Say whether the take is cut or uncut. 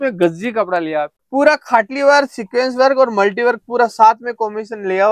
cut